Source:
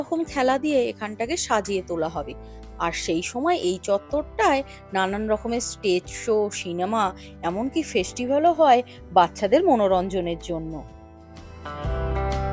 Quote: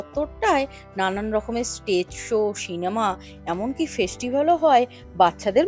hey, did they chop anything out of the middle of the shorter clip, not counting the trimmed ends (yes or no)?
no